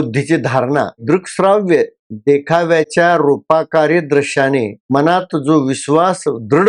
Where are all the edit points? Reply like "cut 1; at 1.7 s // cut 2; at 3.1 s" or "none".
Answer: cut 1; at 1.0 s